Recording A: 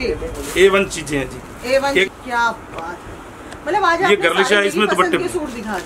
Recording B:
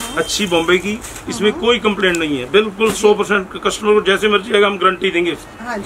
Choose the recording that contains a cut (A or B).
A